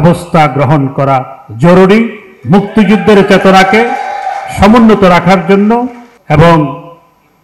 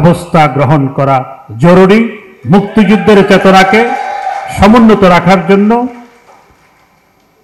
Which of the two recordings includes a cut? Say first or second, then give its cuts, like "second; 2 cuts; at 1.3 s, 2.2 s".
first; 1 cut; at 6.1 s